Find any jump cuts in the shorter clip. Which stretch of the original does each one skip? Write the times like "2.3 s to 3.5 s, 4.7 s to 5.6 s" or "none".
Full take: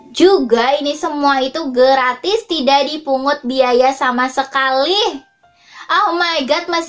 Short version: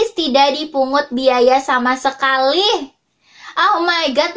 none